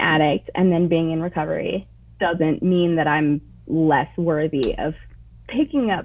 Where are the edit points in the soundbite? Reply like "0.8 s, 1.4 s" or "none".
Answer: 2.0 s